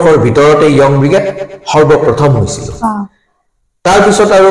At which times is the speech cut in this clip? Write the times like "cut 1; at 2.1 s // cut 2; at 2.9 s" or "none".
none